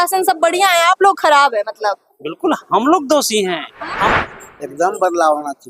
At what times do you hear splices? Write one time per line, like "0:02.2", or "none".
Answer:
0:04.1